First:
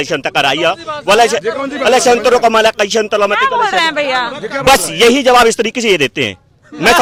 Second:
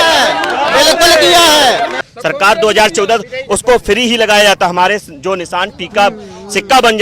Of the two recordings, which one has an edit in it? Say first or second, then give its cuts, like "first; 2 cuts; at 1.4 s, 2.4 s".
second; 1 cut; at 2.0 s